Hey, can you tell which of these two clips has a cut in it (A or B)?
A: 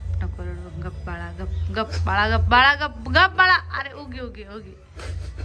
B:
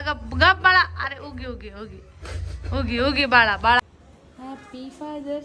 B